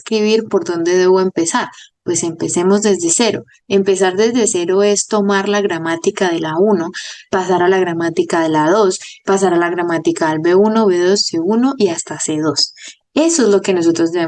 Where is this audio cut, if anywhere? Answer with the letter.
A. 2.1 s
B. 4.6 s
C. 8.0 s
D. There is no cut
D